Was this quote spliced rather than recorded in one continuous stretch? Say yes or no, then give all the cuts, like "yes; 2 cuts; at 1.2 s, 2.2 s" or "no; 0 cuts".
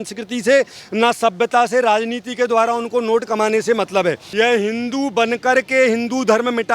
yes; 1 cut; at 4.2 s